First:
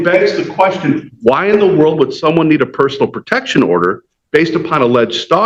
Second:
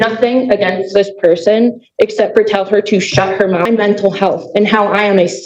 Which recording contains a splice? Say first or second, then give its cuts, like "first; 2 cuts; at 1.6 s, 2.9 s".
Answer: second; 1 cut; at 3.6 s